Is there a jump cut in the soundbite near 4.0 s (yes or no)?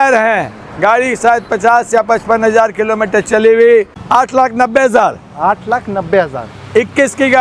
yes